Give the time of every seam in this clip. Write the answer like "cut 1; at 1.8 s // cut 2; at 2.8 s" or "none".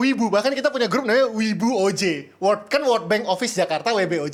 none